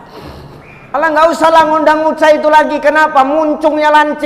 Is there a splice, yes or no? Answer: yes